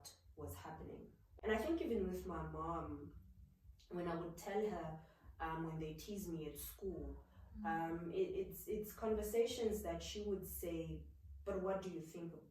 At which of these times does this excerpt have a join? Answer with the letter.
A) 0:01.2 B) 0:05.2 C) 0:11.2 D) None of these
A